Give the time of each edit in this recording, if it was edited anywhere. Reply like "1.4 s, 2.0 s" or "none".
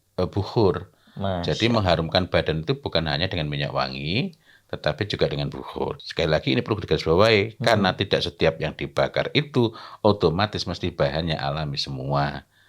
5.9 s